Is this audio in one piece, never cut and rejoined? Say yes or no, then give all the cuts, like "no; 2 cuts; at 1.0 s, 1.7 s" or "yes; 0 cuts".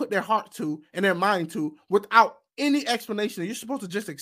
yes; 0 cuts